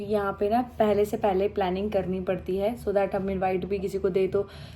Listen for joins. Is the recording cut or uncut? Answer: uncut